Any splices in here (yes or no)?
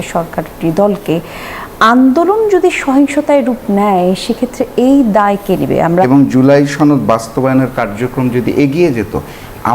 yes